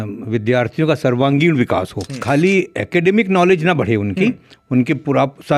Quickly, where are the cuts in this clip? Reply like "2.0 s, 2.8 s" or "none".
2.2 s